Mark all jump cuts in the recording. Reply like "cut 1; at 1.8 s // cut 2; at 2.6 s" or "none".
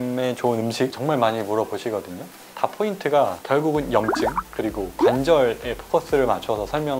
cut 1; at 2.5 s